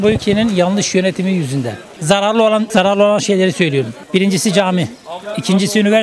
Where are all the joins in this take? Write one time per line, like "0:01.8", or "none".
0:01.9